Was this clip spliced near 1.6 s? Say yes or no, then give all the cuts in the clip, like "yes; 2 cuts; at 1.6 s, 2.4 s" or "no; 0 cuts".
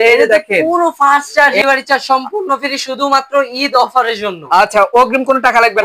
yes; 1 cut; at 1.6 s